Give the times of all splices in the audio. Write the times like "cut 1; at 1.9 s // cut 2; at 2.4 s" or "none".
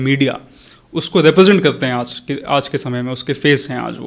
none

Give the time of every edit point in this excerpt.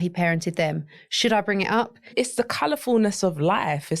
cut 1; at 2.1 s

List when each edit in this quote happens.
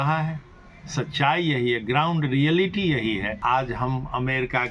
cut 1; at 3.3 s

